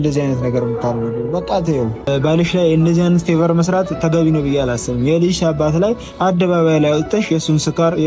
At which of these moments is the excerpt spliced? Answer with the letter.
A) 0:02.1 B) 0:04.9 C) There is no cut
A